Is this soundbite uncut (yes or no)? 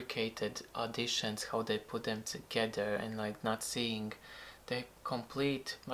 yes